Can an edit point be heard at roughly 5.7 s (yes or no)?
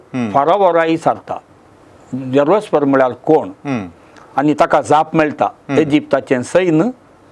no